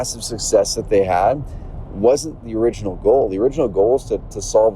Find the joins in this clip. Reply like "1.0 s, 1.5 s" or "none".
2.4 s